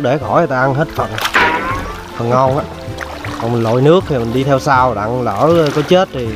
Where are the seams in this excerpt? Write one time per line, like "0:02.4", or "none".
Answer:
none